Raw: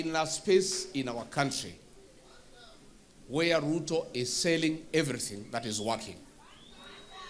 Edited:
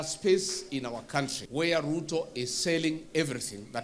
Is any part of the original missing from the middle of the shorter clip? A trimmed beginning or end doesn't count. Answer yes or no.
yes